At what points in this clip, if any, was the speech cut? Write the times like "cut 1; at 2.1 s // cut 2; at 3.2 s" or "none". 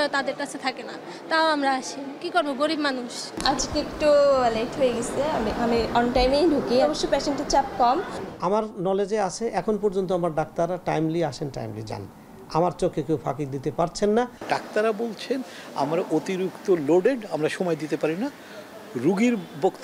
cut 1; at 3.3 s // cut 2; at 8.2 s // cut 3; at 14.4 s

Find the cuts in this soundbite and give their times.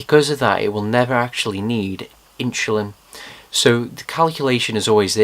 cut 1; at 3.7 s

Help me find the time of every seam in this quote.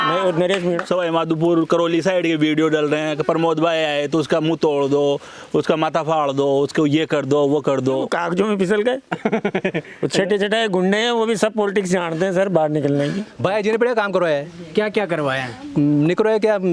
cut 1; at 0.8 s // cut 2; at 8.1 s // cut 3; at 13.3 s

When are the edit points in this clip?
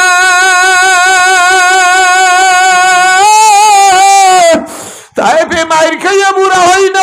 none

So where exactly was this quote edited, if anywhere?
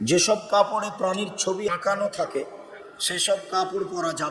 cut 1; at 1.7 s

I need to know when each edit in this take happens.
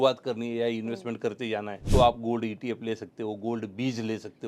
cut 1; at 1.8 s

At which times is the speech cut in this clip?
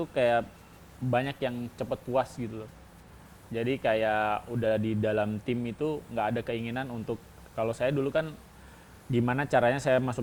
none

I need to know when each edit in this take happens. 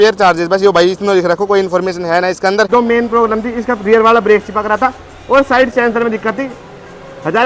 cut 1; at 2.7 s

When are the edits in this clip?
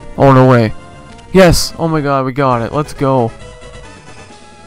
cut 1; at 3.3 s

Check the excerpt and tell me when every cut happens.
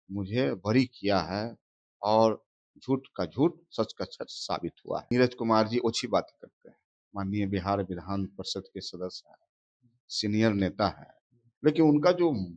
cut 1; at 5.0 s

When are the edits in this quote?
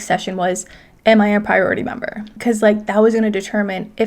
cut 1; at 2.4 s

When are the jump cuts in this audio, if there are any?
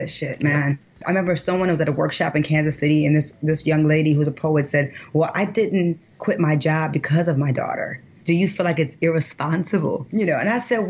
cut 1; at 8.1 s // cut 2; at 10.0 s

